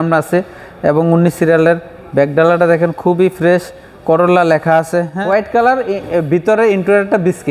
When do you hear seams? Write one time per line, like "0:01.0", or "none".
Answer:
0:05.1